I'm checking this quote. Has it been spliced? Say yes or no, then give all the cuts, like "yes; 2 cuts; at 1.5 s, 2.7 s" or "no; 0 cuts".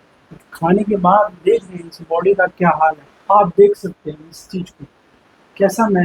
yes; 1 cut; at 3.1 s